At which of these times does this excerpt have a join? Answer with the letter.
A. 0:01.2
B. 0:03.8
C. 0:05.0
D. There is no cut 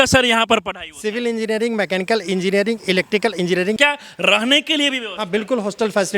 B